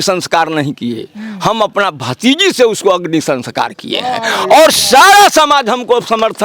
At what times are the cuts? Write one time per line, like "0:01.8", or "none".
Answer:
none